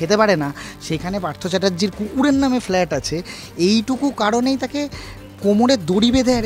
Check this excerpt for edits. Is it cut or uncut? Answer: uncut